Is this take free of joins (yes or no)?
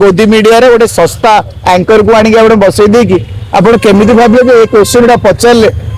yes